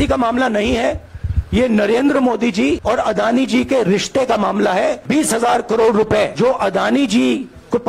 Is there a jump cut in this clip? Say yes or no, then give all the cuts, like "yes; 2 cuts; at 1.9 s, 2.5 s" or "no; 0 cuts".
no; 0 cuts